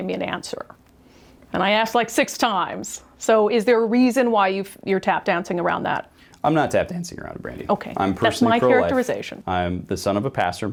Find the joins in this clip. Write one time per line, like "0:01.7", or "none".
none